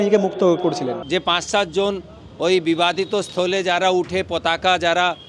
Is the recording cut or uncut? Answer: cut